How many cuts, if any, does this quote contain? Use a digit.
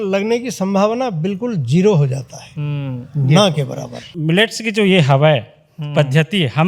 1